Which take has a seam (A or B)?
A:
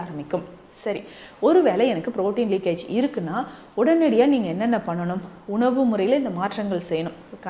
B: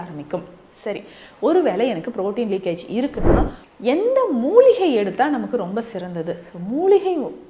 B